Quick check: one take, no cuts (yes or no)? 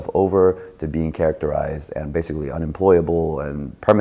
yes